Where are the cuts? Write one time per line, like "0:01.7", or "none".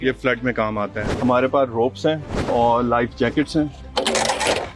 0:01.0
0:02.4
0:03.8